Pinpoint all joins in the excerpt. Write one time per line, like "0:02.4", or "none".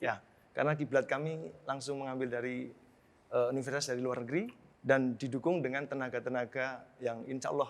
0:04.6